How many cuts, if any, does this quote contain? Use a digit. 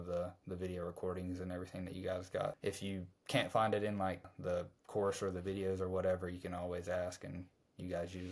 2